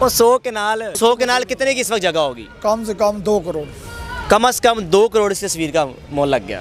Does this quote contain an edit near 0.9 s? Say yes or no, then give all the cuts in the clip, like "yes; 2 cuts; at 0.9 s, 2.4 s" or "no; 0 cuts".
yes; 1 cut; at 0.9 s